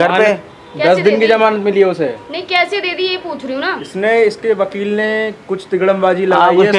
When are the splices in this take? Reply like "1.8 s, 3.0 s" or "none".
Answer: 3.8 s